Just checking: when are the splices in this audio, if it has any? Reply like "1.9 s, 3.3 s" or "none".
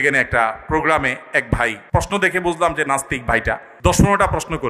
1.8 s, 3.7 s